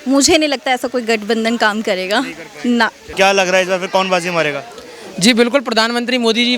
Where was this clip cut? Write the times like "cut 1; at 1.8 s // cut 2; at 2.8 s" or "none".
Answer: cut 1; at 3.0 s